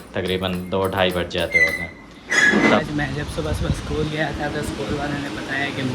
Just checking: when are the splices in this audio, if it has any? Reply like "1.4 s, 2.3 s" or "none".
2.8 s